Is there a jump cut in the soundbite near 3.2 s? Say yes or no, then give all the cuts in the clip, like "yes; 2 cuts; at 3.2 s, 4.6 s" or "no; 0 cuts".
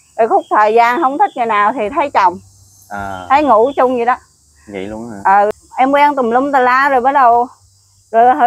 no; 1 cut; at 5.5 s